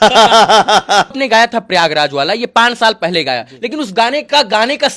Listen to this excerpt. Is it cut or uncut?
cut